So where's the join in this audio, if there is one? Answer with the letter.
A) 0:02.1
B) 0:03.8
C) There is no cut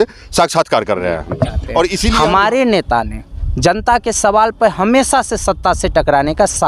A